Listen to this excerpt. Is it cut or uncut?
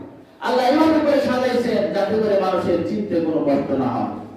uncut